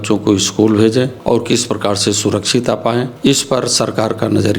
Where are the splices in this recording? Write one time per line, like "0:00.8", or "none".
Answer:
0:01.2
0:03.1